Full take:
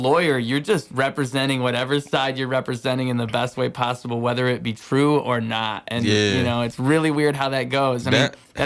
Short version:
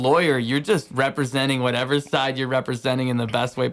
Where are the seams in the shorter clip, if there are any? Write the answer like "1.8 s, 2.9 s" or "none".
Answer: none

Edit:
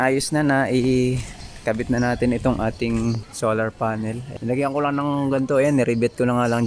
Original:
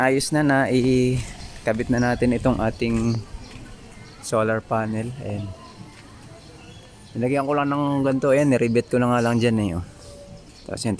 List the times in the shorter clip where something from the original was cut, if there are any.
3.3 s, 4.3 s

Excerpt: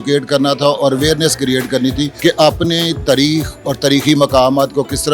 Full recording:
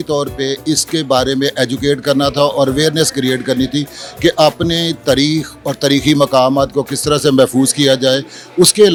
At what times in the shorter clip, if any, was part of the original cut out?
2.1 s

